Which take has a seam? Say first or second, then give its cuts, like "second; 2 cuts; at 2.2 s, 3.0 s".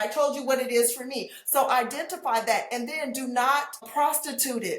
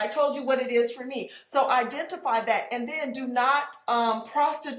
first; 1 cut; at 3.8 s